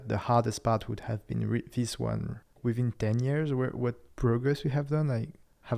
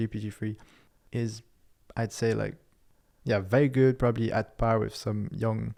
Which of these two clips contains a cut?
first; 1 cut; at 2.5 s

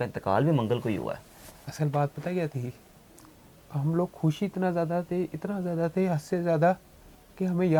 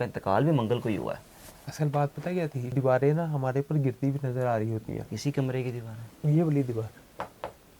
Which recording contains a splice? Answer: second; 1 cut; at 2.6 s

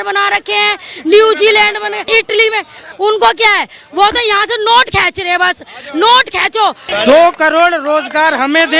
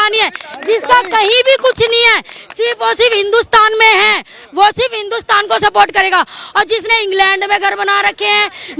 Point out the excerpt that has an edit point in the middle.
first; 3 cuts; at 2.0 s, 2.8 s, 6.8 s

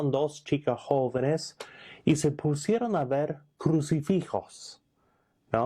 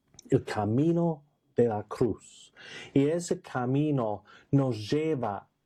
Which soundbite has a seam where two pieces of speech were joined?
first; 1 cut; at 2.4 s

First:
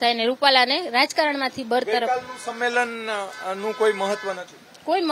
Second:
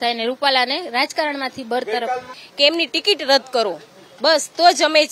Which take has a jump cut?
second; 1 cut; at 2.4 s

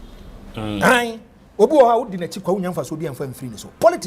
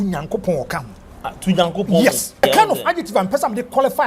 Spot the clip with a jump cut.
second; 1 cut; at 2.4 s

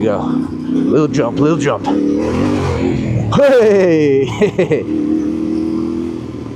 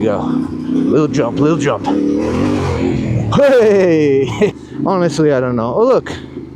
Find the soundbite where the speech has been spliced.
second; 1 cut; at 4.5 s

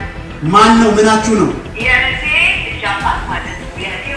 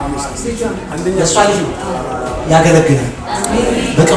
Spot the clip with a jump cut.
first; 1 cut; at 1.7 s

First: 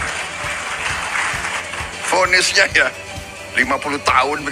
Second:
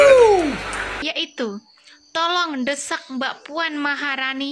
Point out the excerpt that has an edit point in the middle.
second; 1 cut; at 1.0 s

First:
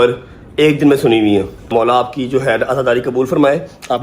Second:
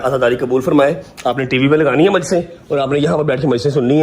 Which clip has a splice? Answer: first; 1 cut; at 1.7 s

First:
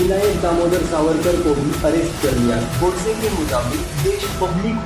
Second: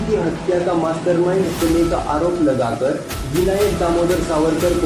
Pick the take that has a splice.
first; 1 cut; at 2.7 s

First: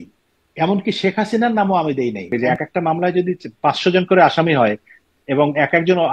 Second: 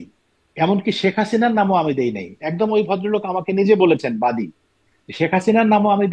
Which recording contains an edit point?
first; 1 cut; at 2.3 s

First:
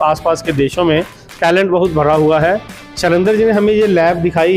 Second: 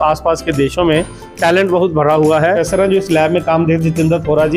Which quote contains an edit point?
second; 1 cut; at 2.6 s

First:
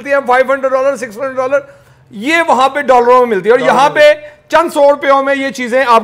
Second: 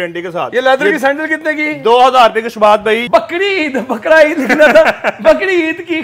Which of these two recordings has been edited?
second; 1 cut; at 3.0 s

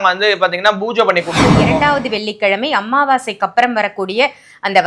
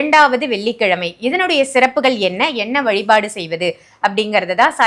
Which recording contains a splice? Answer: first; 1 cut; at 1.6 s

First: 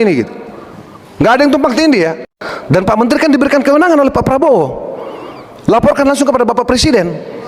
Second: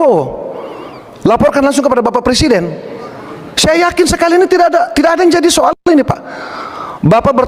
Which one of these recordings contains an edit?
first; 1 cut; at 2.3 s

